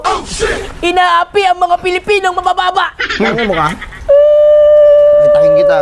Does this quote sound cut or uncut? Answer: uncut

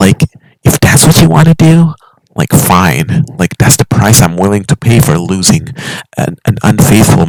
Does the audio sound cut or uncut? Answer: uncut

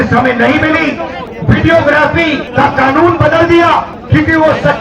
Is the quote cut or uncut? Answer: cut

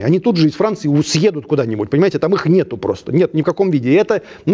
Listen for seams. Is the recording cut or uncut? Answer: uncut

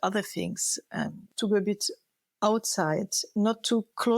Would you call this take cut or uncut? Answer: cut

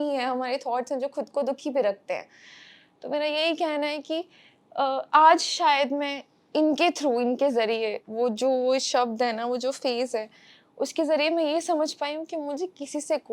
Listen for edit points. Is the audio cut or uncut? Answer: uncut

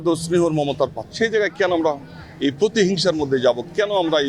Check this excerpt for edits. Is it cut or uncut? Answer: cut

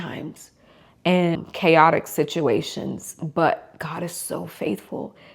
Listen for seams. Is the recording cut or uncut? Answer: cut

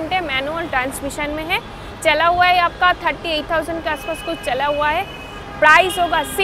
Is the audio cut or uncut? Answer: uncut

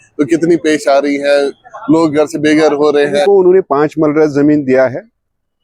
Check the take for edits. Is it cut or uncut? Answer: cut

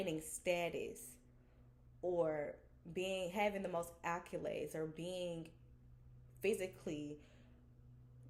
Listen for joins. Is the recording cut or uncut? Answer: uncut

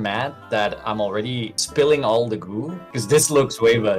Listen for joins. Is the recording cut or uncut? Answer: cut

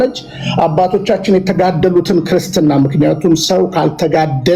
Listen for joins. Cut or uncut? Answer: uncut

